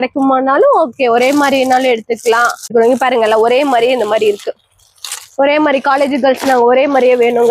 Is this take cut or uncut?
cut